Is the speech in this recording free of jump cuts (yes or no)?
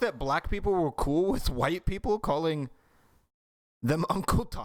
yes